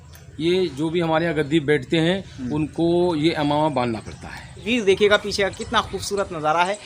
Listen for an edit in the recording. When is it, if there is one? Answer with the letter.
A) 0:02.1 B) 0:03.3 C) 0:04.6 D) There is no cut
C